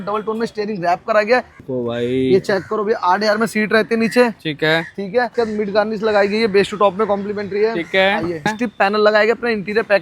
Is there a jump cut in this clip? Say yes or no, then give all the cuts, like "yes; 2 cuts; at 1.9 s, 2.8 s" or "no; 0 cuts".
yes; 3 cuts; at 1.6 s, 5.3 s, 8.5 s